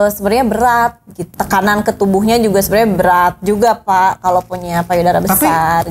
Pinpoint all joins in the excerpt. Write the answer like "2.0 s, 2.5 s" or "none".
1.2 s